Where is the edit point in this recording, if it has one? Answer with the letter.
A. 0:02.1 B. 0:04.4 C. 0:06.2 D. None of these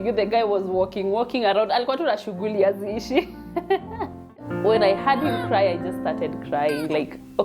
B